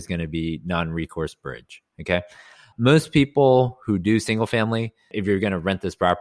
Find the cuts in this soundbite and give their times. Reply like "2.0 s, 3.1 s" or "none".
5.1 s